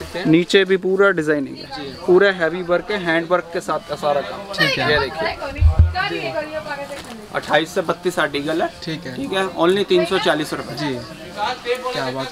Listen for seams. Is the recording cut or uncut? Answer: uncut